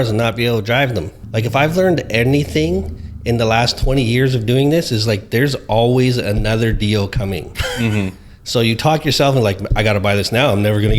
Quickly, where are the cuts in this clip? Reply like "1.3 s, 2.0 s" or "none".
1.2 s